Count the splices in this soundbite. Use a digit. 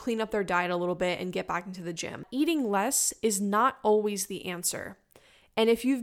1